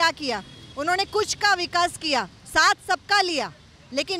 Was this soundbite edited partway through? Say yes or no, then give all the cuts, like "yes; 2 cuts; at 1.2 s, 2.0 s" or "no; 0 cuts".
no; 0 cuts